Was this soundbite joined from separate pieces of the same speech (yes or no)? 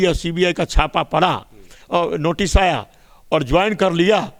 no